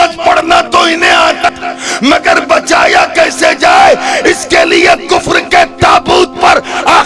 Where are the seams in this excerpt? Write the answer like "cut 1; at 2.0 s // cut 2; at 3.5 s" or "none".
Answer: cut 1; at 1.5 s